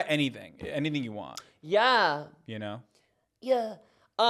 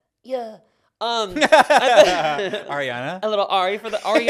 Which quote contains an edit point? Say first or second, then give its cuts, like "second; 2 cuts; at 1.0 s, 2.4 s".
first; 1 cut; at 1.3 s